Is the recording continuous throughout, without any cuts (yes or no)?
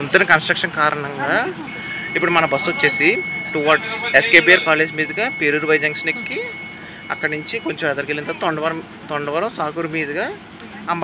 yes